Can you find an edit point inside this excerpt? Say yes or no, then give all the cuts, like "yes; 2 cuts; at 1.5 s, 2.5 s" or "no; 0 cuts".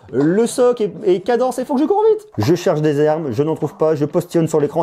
yes; 1 cut; at 2.3 s